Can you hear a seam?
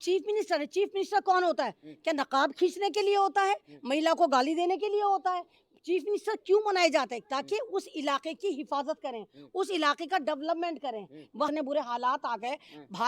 yes; 1 cut; at 11.5 s

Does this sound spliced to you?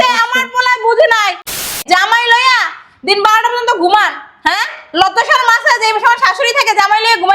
yes; 1 cut; at 1.6 s

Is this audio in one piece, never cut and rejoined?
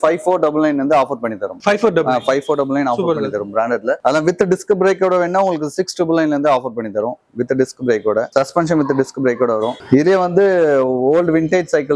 yes; 0 cuts

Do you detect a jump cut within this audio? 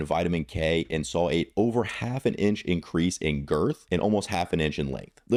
no; 0 cuts

